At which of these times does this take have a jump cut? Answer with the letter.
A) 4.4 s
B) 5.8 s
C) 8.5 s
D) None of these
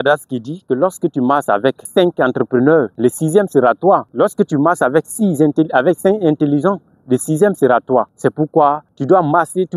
C